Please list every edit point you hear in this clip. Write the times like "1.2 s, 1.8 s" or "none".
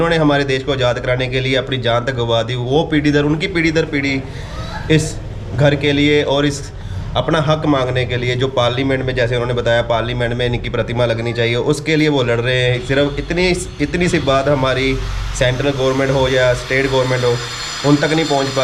none